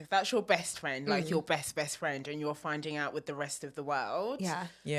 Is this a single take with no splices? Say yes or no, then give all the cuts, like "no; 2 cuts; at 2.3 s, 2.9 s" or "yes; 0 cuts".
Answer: yes; 0 cuts